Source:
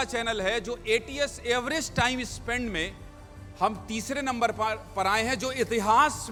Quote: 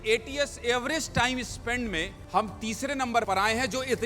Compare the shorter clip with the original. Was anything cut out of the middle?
yes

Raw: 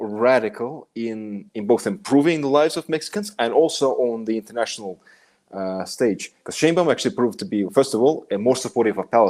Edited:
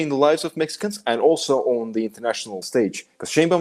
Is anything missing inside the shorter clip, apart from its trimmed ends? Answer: yes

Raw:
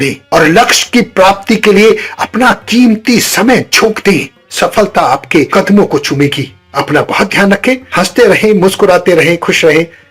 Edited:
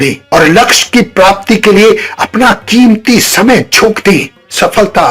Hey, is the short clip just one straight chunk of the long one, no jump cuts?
yes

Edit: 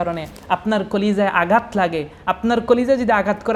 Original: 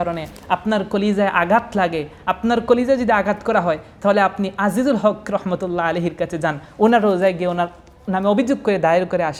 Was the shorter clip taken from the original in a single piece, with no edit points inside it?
yes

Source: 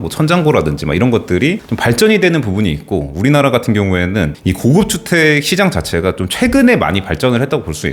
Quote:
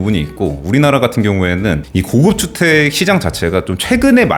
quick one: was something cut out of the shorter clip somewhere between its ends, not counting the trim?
no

